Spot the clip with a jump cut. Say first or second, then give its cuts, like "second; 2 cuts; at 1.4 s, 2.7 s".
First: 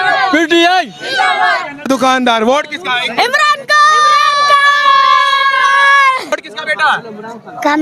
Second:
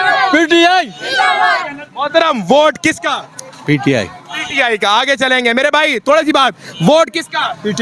first; 2 cuts; at 1.9 s, 6.3 s